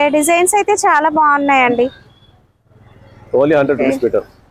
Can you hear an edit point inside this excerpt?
no; 0 cuts

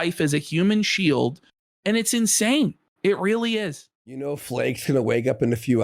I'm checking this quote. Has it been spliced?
yes; 1 cut; at 4.2 s

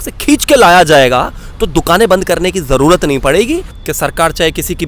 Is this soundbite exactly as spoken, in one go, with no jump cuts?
no; 1 cut; at 3.8 s

